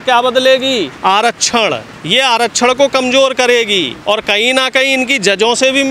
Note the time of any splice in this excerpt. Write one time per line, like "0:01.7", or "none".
0:00.9
0:01.9
0:03.9